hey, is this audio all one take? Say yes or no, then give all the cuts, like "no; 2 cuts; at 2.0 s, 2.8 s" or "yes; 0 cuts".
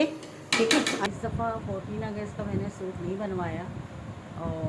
no; 1 cut; at 1.1 s